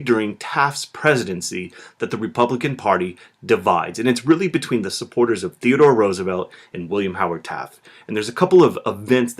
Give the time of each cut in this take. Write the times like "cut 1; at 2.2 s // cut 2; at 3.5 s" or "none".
cut 1; at 1.5 s